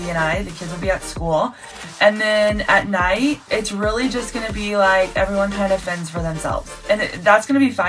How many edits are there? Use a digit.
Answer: 2